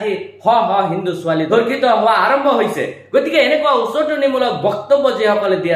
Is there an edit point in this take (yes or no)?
yes